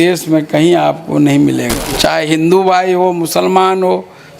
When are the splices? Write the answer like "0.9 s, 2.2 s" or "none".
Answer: 1.8 s

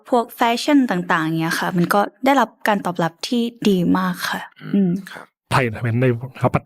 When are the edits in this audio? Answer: 5.5 s

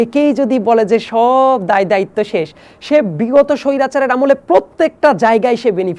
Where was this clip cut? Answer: none

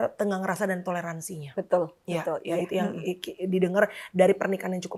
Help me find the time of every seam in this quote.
none

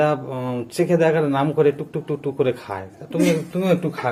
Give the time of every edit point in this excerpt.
none

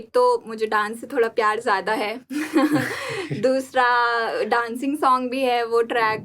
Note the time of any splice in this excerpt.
none

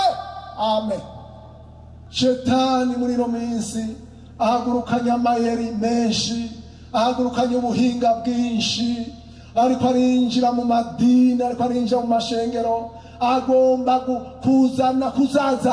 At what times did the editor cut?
2.1 s

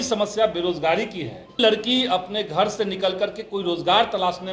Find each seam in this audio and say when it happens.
1.6 s

